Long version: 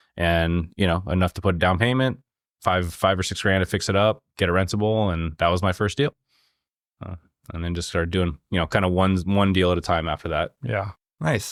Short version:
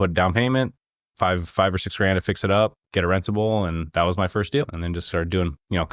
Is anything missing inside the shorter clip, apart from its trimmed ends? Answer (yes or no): yes